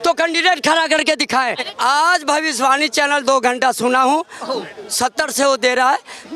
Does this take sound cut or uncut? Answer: cut